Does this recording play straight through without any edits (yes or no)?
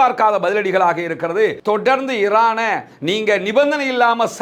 no